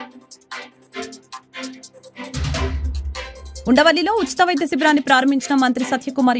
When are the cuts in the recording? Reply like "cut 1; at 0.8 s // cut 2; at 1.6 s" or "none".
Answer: cut 1; at 2.6 s

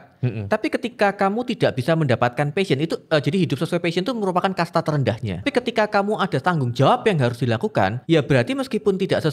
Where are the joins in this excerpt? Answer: cut 1; at 5.4 s // cut 2; at 8.0 s

